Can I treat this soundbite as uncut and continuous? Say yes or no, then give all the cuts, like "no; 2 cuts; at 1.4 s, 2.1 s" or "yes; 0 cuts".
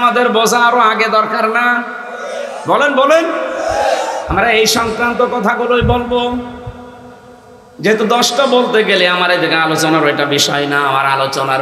yes; 0 cuts